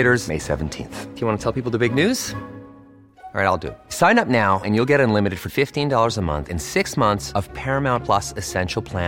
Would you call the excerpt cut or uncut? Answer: uncut